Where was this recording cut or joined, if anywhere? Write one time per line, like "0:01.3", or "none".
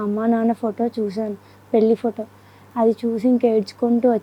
none